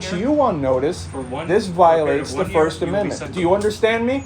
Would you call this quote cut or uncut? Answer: cut